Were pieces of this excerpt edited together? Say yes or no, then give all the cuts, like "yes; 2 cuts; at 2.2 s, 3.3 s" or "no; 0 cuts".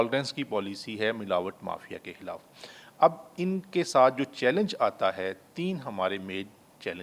no; 0 cuts